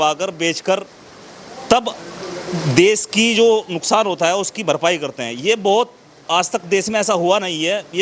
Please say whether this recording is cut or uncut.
uncut